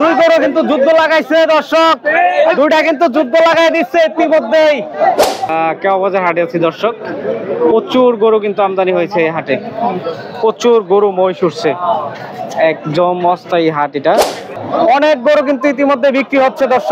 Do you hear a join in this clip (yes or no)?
yes